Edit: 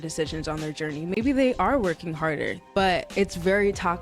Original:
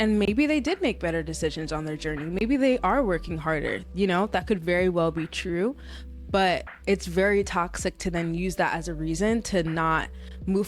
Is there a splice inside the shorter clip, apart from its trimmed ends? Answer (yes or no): yes